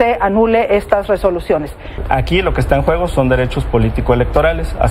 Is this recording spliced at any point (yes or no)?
yes